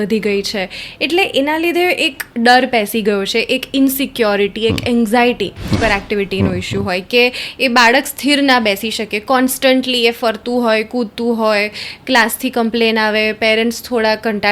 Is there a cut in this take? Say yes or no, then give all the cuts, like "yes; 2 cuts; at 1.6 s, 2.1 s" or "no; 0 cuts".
yes; 1 cut; at 5.8 s